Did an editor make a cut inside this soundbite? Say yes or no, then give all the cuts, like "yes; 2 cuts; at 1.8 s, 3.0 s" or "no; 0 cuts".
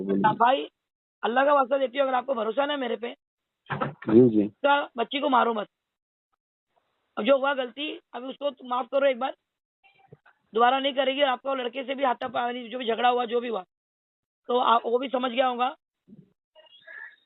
no; 0 cuts